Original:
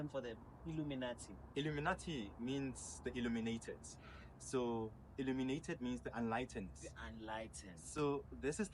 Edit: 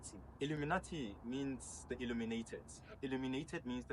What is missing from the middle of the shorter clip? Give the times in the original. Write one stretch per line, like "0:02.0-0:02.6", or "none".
0:04.0-0:05.0

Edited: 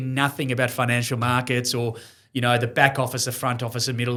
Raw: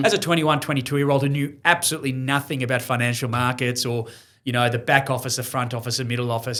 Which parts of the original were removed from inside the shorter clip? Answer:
none

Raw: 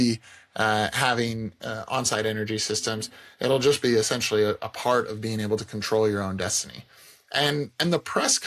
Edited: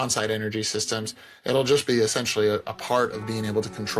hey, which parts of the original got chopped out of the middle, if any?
none

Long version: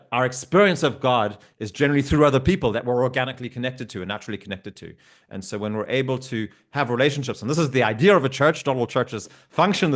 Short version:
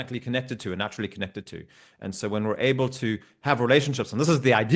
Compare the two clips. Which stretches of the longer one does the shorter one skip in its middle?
none

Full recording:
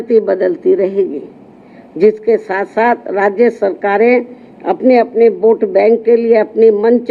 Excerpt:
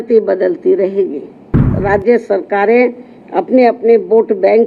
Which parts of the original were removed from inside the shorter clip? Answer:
0:01.8-0:03.1

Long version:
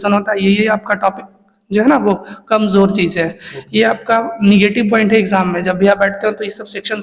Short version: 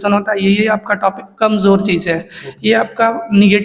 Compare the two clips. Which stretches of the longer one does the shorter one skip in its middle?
0:01.3-0:02.4

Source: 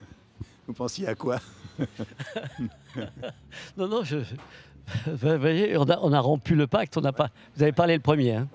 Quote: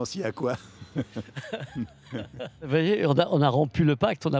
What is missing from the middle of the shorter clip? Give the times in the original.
0:03.5-0:05.4

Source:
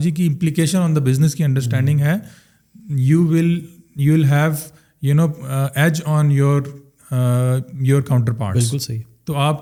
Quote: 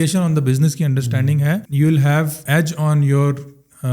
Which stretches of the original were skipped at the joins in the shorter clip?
0:02.3-0:03.9
0:04.7-0:05.7

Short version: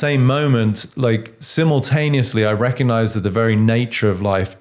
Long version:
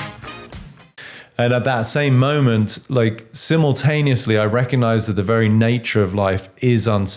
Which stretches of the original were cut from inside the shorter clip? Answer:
none

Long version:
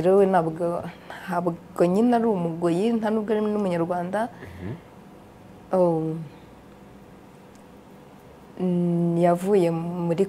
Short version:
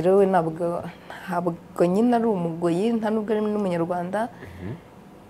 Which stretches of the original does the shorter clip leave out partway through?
none

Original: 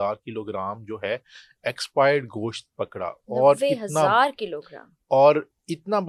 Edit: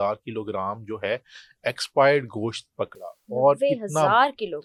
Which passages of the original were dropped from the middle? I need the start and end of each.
none

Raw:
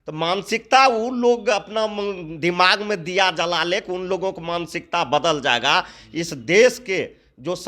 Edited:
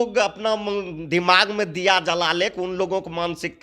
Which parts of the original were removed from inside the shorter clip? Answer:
none

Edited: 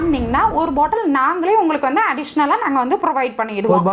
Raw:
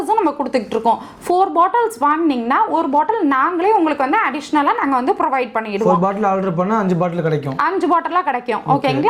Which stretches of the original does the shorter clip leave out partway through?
none

